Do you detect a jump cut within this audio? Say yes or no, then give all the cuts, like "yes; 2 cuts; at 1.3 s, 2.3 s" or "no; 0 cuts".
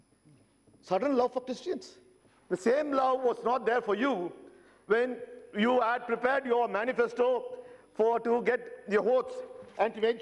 no; 0 cuts